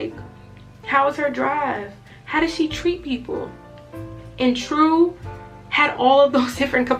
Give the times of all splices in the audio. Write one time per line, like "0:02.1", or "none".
none